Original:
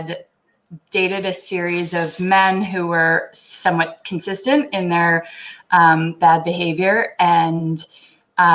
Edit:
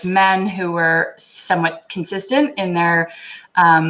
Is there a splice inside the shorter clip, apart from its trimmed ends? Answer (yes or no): no